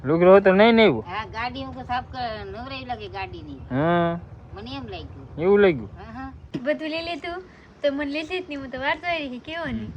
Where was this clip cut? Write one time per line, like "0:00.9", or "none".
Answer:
0:06.4